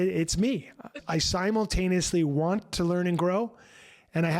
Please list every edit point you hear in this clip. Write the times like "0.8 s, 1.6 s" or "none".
1.0 s